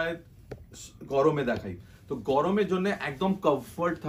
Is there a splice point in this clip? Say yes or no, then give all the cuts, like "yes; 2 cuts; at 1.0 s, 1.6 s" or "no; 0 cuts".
no; 0 cuts